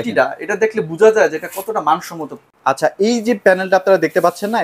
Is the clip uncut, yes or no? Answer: no